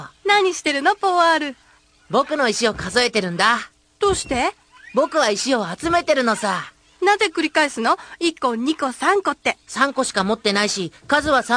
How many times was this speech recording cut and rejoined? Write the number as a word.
zero